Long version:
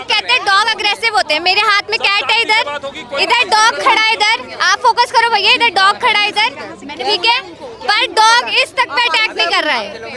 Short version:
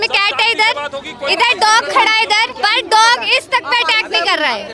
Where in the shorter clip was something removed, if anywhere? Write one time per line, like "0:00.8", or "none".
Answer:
0:02.5